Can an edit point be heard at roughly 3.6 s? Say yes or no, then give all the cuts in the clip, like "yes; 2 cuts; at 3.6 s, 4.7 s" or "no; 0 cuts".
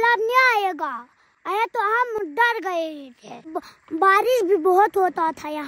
yes; 1 cut; at 3.6 s